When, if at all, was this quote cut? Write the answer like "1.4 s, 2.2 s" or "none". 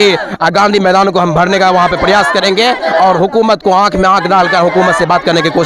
none